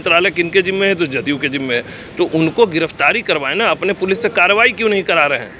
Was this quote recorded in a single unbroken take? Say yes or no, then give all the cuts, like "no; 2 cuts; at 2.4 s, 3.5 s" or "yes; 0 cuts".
yes; 0 cuts